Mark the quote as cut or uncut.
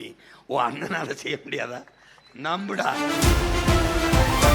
cut